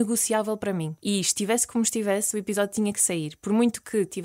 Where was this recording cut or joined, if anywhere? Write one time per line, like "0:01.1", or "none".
0:00.9